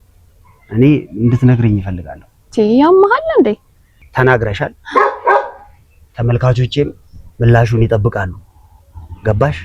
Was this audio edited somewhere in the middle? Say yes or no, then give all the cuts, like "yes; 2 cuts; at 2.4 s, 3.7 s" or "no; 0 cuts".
yes; 1 cut; at 4.0 s